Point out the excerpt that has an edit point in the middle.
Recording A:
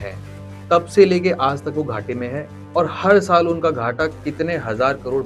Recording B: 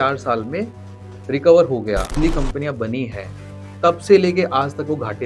B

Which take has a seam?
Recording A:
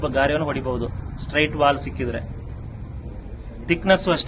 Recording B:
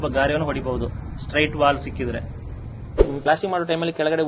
B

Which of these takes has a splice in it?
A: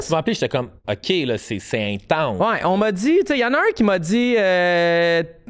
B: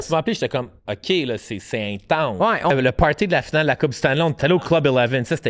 B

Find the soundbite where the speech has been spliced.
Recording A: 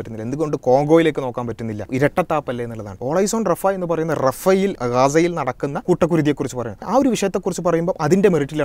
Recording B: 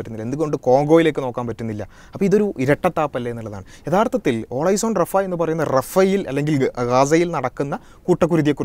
A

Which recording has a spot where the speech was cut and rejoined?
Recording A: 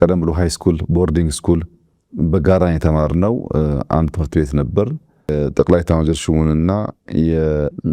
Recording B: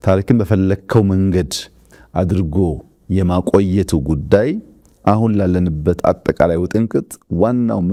A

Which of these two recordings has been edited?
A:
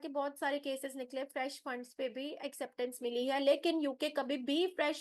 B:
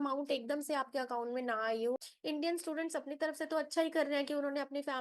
B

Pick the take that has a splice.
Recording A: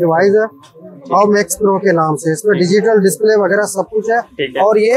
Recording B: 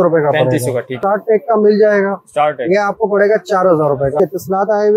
B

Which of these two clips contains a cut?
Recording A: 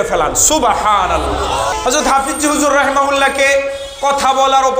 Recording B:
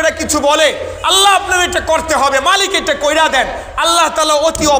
A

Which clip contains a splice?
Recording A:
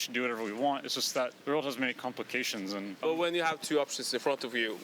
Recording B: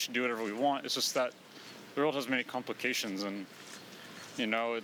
A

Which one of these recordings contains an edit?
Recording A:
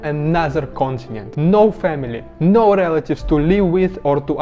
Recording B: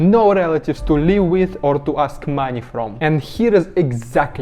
B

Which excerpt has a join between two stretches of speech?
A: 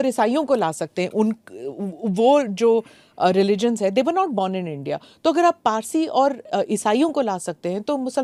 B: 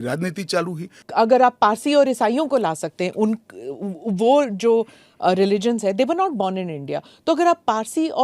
B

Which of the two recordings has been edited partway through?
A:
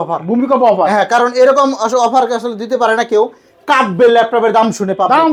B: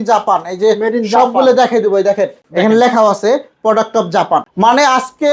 B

